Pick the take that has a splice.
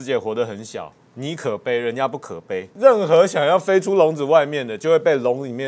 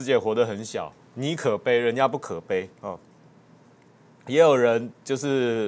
first; 1 cut; at 2.7 s

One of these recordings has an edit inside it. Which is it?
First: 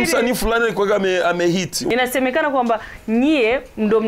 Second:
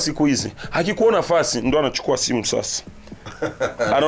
first; 1 cut; at 1.8 s

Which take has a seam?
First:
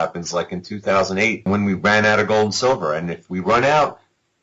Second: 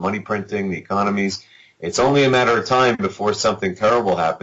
first; 1 cut; at 1.5 s

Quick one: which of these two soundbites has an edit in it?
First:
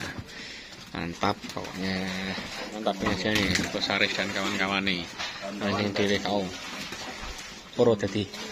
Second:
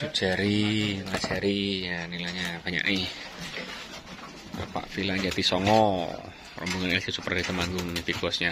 first; 1 cut; at 2.7 s

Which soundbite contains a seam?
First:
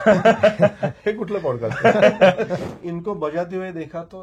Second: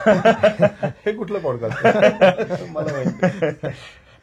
first; 1 cut; at 2.7 s

